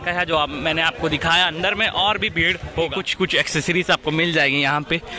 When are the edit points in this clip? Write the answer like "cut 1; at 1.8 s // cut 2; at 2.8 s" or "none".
cut 1; at 3.0 s